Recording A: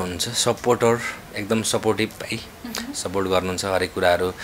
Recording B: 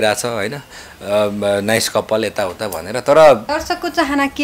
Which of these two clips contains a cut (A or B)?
B